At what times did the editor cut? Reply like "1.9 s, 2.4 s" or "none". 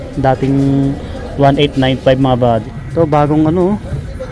2.8 s

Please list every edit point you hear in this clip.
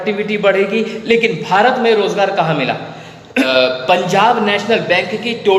3.5 s

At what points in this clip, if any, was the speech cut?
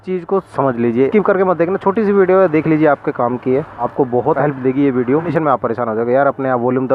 1.1 s, 5.3 s

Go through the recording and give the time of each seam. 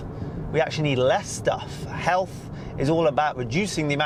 none

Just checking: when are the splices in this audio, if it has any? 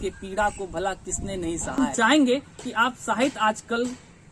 1.8 s

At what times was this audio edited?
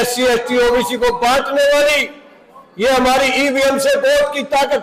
none

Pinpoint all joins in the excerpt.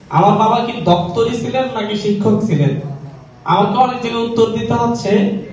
none

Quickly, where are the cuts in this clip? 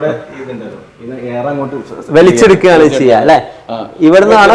none

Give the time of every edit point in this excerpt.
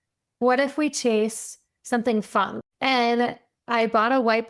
2.5 s

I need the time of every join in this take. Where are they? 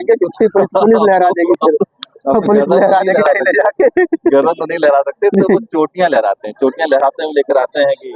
none

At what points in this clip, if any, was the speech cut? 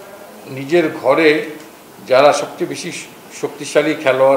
none

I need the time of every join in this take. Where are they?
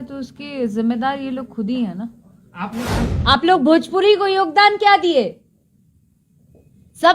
3.0 s

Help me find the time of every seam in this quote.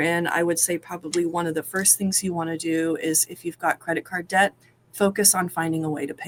none

